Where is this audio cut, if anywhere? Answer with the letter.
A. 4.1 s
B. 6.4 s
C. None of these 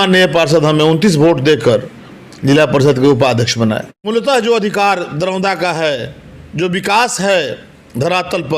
A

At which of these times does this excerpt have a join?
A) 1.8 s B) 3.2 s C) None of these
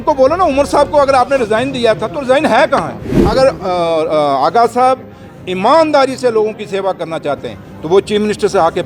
B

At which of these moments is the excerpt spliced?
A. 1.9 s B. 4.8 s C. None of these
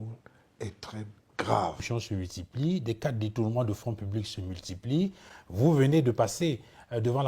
A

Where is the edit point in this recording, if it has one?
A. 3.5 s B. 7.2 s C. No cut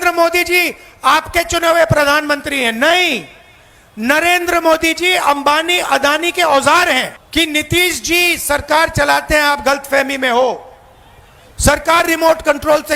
B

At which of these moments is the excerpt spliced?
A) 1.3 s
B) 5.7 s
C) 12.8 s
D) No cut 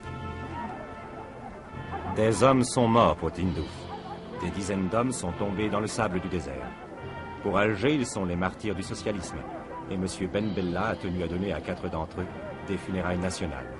C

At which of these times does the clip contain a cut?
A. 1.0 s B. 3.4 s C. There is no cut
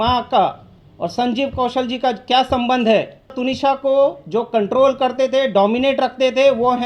B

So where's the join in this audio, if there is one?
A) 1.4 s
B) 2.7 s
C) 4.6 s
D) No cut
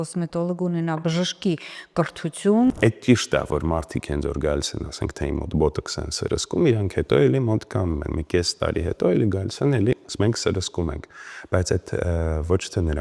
B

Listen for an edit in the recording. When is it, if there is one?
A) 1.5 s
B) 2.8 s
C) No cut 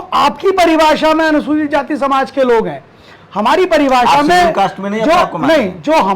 C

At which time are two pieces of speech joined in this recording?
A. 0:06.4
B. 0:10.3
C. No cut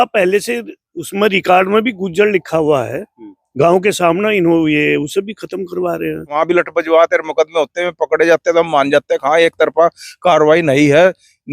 A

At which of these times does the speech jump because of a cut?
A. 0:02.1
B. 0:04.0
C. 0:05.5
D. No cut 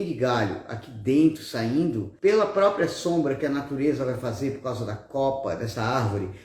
A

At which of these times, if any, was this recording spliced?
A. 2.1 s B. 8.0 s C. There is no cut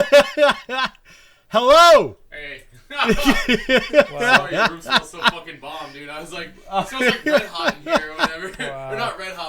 C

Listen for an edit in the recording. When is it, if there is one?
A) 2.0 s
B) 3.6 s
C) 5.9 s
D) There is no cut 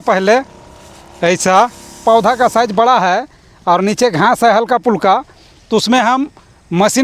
A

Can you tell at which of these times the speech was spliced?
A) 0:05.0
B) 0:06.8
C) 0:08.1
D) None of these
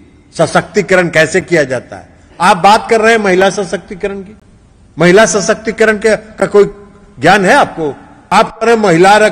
C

